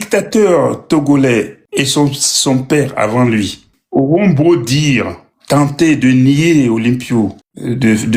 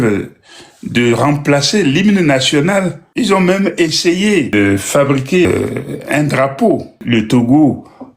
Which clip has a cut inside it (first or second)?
second